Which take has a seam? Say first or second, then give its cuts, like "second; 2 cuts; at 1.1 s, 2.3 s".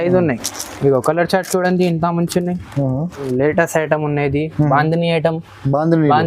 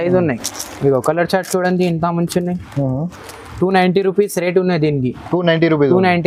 first; 1 cut; at 3.3 s